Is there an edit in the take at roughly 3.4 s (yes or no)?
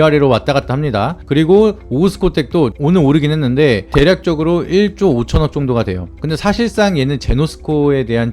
no